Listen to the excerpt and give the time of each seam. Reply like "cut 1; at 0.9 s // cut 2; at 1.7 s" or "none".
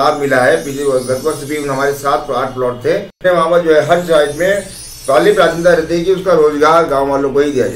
cut 1; at 3.2 s